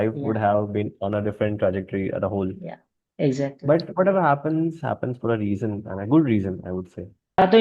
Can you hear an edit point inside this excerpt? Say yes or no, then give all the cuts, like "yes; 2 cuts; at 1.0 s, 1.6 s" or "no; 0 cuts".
no; 0 cuts